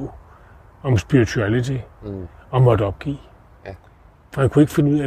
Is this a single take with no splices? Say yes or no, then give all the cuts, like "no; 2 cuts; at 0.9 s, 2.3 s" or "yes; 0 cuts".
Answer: yes; 0 cuts